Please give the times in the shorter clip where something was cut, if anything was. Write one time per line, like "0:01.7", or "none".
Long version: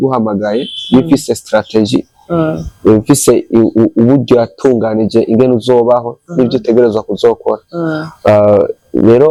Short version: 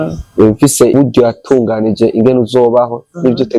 0:00.9